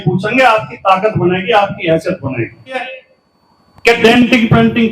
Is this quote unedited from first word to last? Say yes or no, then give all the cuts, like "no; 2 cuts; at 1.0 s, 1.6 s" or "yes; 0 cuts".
no; 1 cut; at 2.9 s